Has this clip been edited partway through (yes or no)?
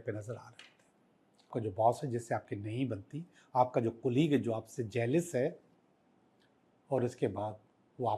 yes